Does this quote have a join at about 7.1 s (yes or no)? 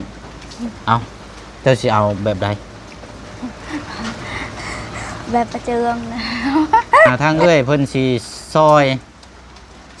yes